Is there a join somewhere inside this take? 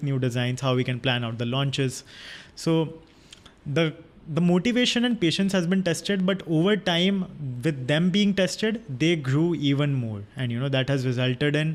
no; 0 cuts

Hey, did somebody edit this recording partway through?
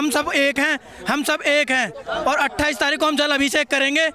no; 0 cuts

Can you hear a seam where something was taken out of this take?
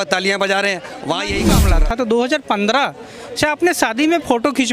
yes; 1 cut; at 1.4 s

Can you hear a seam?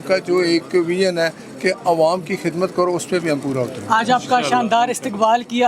no; 0 cuts

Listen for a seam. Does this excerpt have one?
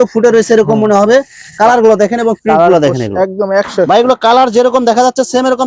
no; 0 cuts

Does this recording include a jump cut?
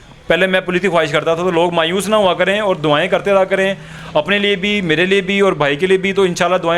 no; 0 cuts

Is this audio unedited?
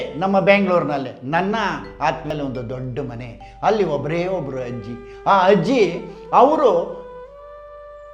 no; 1 cut; at 2.2 s

